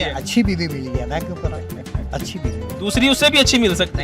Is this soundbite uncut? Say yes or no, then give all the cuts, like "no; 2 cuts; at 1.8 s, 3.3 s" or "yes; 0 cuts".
yes; 0 cuts